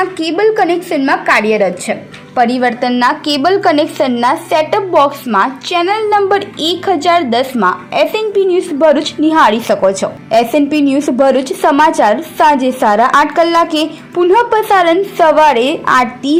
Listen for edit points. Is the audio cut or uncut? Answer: uncut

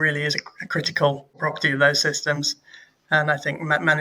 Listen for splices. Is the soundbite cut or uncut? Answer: cut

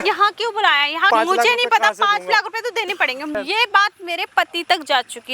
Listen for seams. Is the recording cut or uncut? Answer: cut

